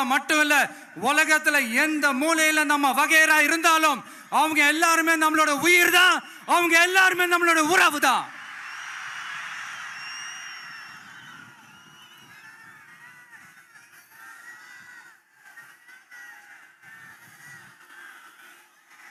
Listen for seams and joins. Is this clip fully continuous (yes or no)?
yes